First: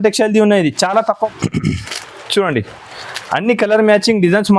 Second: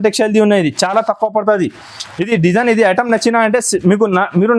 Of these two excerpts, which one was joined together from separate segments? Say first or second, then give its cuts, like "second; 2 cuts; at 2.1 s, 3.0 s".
first; 1 cut; at 1.3 s